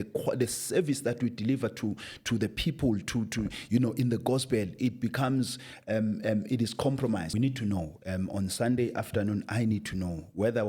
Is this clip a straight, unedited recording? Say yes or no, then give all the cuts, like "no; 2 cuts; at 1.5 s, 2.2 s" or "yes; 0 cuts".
no; 1 cut; at 7.3 s